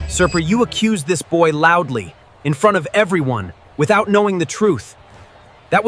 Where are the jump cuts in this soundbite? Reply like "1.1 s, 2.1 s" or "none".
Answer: none